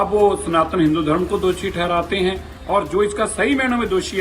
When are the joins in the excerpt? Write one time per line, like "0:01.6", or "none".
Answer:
0:02.5